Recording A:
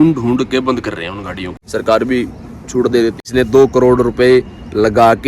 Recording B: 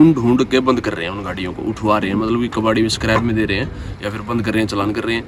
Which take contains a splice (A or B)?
A